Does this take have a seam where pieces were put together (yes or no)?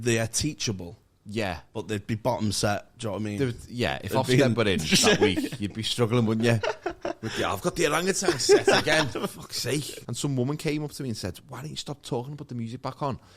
yes